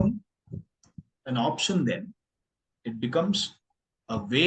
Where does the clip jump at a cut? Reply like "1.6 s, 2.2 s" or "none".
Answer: none